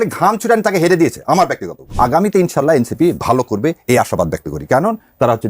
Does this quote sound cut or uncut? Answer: cut